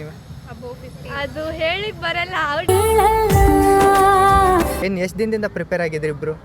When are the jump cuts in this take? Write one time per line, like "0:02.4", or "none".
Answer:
0:04.8